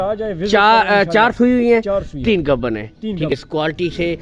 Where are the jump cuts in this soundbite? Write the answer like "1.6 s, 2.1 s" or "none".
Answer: 3.3 s